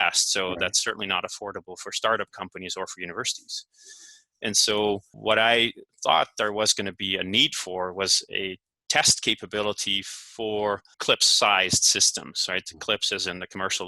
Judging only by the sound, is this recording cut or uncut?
cut